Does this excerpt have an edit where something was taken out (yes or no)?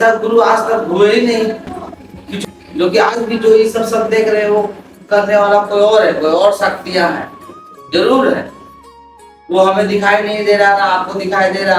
yes